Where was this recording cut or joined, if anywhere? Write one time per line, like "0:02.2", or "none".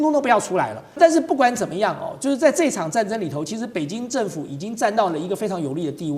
0:01.0